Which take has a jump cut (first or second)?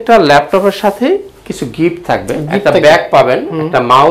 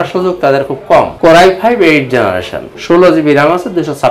second